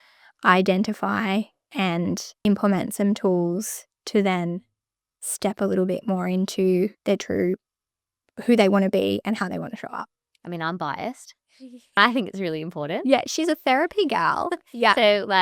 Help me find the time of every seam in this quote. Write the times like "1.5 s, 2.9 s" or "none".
2.3 s, 7.0 s, 12.0 s